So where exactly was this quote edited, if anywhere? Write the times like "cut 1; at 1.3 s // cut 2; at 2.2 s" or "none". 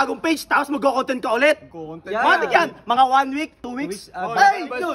none

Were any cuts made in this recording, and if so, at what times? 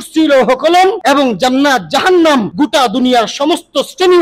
cut 1; at 1.0 s // cut 2; at 2.5 s

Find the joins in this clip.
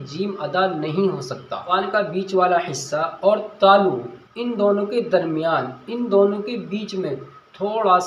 cut 1; at 1.7 s

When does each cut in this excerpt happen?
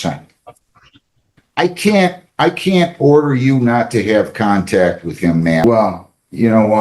cut 1; at 5.6 s

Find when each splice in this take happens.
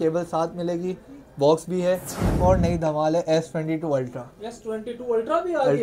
cut 1; at 2.4 s

